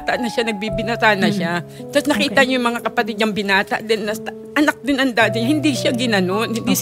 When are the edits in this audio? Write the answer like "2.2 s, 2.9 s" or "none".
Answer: none

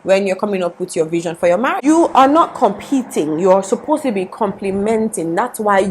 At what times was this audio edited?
1.8 s

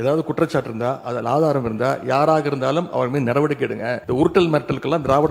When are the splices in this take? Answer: 4.0 s

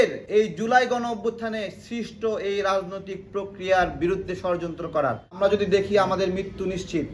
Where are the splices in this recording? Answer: 5.4 s

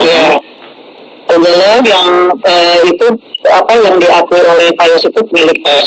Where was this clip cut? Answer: none

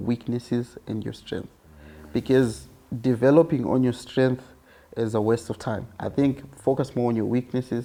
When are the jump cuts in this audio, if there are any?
none

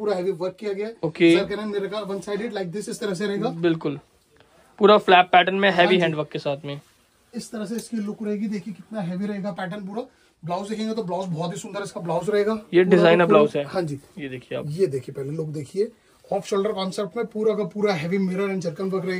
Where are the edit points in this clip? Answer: none

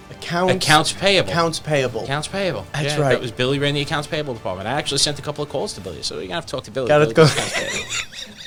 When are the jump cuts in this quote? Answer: none

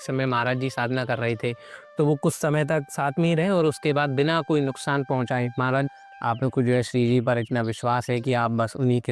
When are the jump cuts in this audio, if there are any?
5.9 s

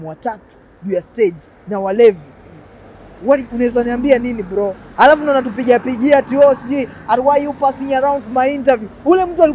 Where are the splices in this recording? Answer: 4.8 s

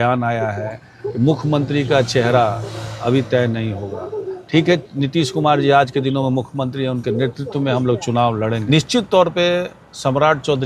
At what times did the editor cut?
8.6 s

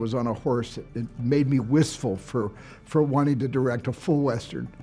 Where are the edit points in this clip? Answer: none

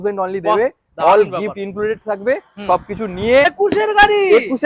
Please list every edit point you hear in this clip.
3.5 s

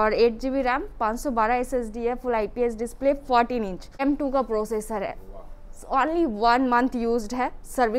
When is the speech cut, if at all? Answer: 4.0 s

